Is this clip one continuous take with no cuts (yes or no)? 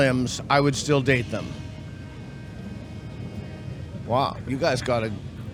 yes